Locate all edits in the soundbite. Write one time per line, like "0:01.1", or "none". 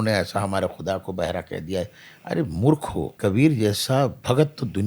0:03.1